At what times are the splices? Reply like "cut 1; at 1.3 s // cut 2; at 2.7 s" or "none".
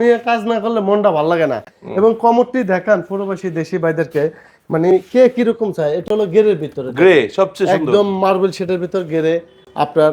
none